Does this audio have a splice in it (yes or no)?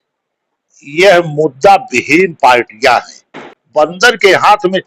yes